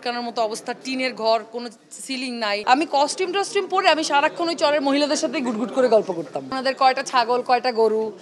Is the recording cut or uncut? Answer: cut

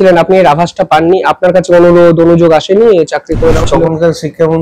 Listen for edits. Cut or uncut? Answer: cut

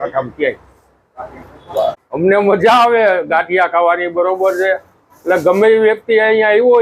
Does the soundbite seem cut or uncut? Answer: cut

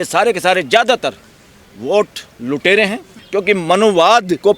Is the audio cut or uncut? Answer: cut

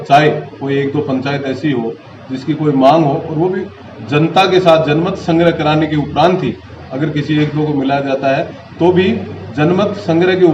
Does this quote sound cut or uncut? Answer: uncut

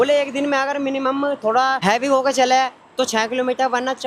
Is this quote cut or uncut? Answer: cut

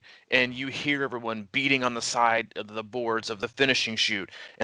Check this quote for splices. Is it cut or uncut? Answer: cut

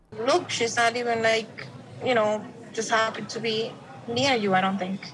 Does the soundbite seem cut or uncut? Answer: uncut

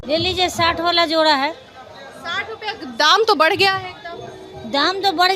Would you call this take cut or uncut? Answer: uncut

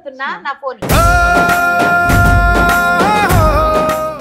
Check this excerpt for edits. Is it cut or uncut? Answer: uncut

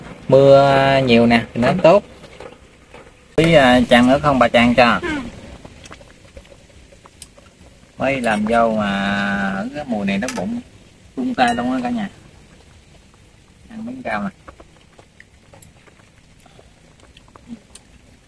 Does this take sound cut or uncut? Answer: cut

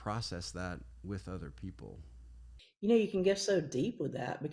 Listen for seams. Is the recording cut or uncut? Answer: uncut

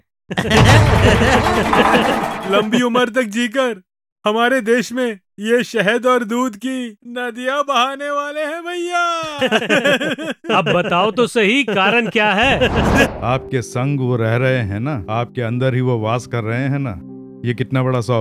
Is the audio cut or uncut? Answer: cut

